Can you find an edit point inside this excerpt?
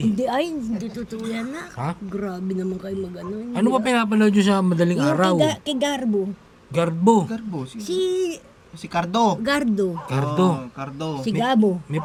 no; 0 cuts

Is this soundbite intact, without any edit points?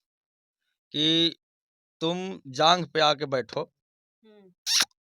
yes; 0 cuts

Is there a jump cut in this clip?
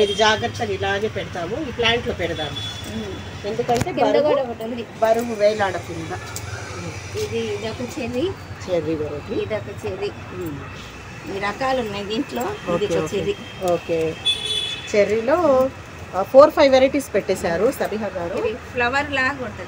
no; 0 cuts

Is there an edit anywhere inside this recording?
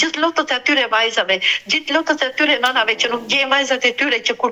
no; 0 cuts

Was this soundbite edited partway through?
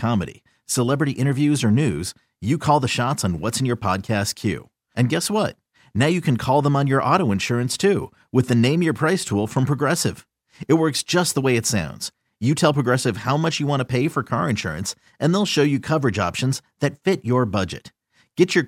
no; 0 cuts

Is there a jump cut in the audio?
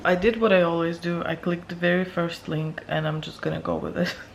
no; 0 cuts

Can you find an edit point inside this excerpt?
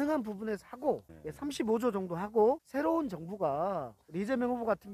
yes; 3 cuts; at 1.0 s, 2.6 s, 4.0 s

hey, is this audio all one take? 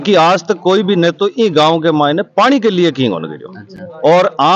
yes; 0 cuts

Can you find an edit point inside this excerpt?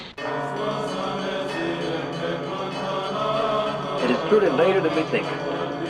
no; 0 cuts

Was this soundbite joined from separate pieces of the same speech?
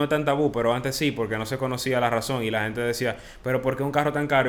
no; 0 cuts

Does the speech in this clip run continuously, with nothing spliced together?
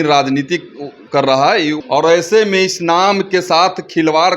no; 1 cut; at 1.8 s

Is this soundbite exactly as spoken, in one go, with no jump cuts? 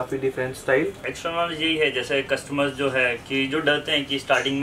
no; 1 cut; at 1.1 s

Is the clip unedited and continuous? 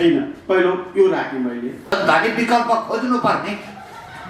no; 1 cut; at 2.0 s

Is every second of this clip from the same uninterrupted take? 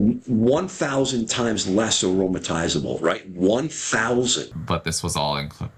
no; 1 cut; at 4.5 s

